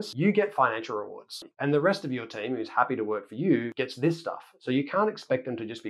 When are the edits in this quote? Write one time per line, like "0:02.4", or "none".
0:01.4